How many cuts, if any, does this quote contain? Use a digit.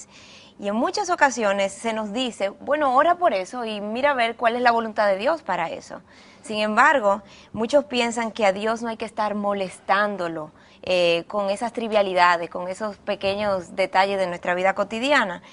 1